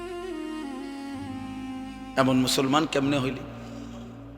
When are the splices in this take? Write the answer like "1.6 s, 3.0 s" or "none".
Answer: 1.4 s, 3.4 s